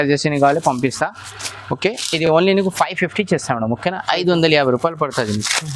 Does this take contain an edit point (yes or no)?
no